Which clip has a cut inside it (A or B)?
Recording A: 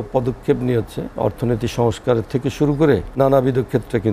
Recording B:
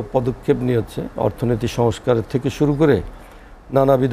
A